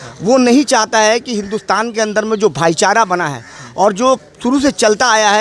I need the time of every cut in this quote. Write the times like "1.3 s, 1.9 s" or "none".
none

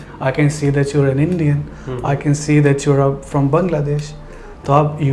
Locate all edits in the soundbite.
none

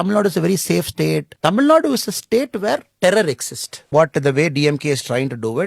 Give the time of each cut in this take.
1.3 s, 2.9 s, 3.9 s

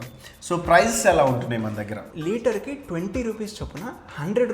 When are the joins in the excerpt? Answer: 2.0 s

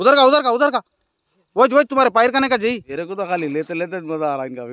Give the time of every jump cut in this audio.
2.9 s

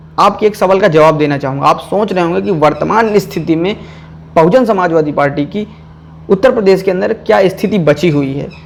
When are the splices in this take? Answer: none

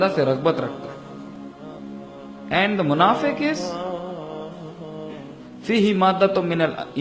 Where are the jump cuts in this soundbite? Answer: none

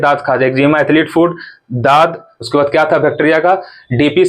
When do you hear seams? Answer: 2.3 s

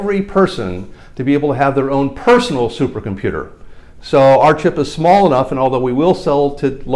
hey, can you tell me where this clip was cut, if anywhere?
none

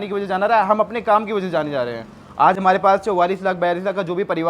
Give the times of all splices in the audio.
none

